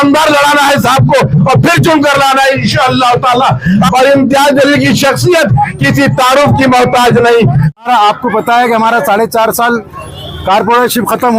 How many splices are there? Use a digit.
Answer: 2